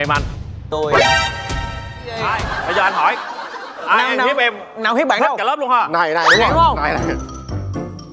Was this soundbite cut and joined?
yes; 1 cut; at 2.2 s

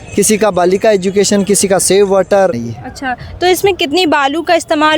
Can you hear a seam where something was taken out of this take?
yes; 1 cut; at 2.7 s

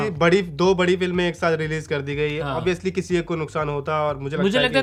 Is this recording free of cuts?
yes; 0 cuts

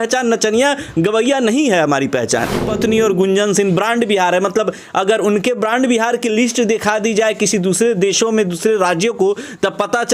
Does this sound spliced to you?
yes; 1 cut; at 2.6 s

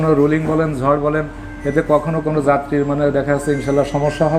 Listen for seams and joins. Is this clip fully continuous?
yes; 0 cuts

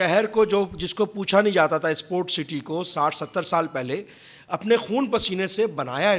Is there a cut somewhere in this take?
no; 0 cuts

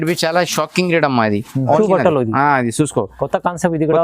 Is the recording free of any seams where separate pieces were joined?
no; 1 cut; at 1.8 s

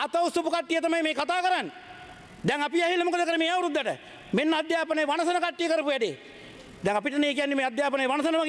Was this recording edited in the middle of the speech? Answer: no; 0 cuts

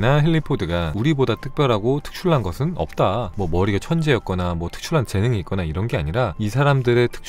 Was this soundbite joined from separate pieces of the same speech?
yes; 3 cuts; at 0.9 s, 3.3 s, 6.3 s

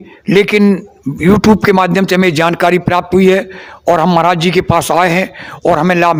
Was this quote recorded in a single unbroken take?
yes; 0 cuts

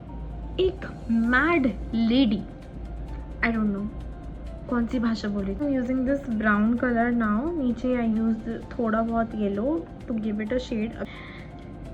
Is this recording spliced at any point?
yes; 2 cuts; at 5.6 s, 11.0 s

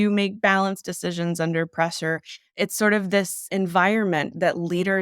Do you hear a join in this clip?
yes; 1 cut; at 3.5 s

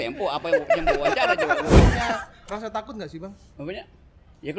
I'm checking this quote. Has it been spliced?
yes; 1 cut; at 1.7 s

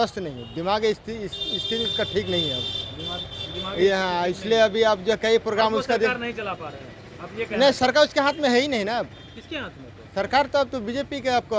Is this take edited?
no; 0 cuts

